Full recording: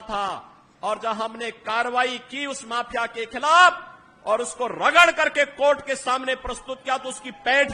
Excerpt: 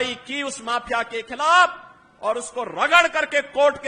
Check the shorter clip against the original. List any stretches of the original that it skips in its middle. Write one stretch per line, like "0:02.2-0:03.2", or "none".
none

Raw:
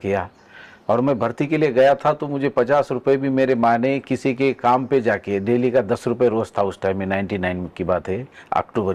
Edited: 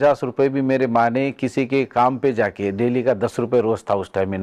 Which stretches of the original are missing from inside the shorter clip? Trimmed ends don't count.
none

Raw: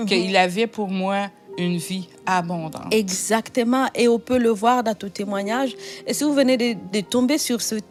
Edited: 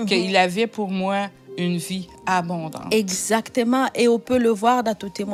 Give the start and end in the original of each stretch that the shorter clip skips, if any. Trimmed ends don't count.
none

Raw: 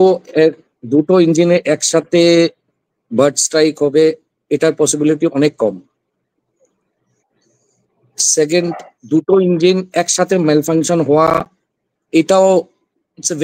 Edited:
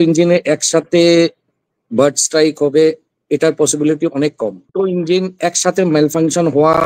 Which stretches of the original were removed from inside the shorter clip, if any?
0:05.9-0:09.3

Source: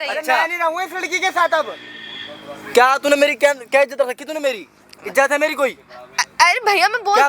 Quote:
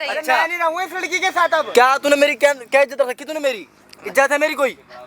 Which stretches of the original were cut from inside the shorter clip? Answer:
0:01.7-0:02.7

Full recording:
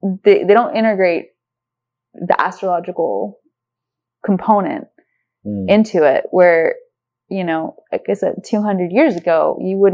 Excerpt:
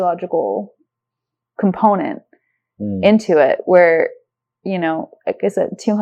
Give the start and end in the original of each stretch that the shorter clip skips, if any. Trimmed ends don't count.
none

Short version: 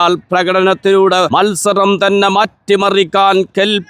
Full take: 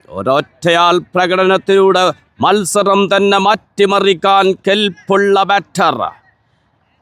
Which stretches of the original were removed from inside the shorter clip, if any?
0:02.1-0:02.4

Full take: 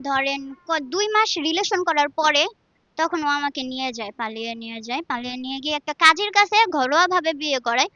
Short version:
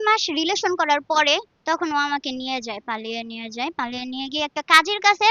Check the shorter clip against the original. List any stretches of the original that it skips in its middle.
0:02.6-0:02.8

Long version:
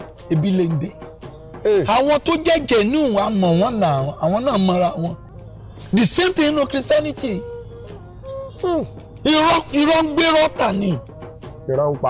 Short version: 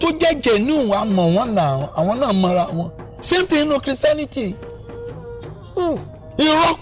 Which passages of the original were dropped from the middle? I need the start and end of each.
0:05.5-0:06.1

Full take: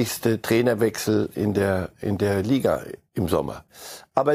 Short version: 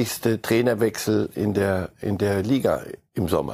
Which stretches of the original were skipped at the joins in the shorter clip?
none

